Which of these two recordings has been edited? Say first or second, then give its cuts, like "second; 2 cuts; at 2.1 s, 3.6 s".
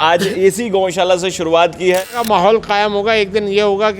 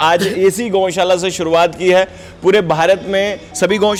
first; 1 cut; at 2.1 s